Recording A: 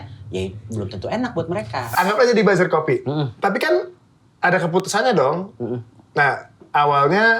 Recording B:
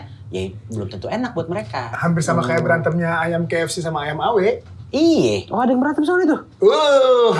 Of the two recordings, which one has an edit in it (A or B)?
A